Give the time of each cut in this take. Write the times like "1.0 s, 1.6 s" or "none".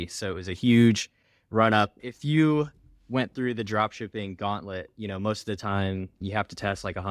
2.0 s, 6.2 s

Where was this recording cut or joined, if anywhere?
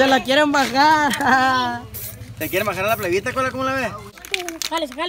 4.1 s

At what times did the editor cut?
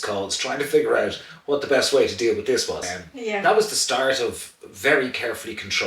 3.4 s

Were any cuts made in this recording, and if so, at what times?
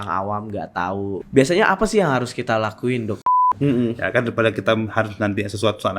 1.2 s, 3.4 s

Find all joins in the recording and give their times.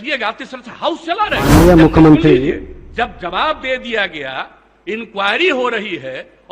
1.5 s

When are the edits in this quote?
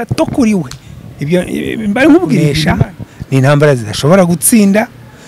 2.5 s

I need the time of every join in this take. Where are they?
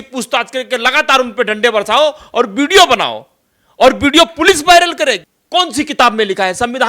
5.3 s

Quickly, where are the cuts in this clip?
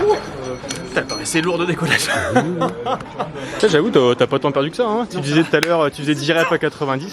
3.5 s

